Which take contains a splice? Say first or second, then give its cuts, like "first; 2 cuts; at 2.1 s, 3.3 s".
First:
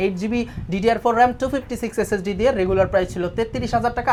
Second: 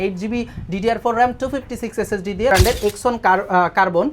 second; 1 cut; at 2.5 s